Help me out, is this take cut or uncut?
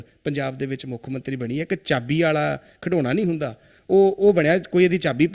uncut